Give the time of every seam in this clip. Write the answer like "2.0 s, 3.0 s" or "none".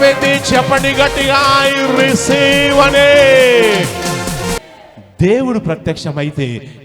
4.6 s